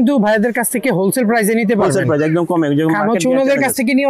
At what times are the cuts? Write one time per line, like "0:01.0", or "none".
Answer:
none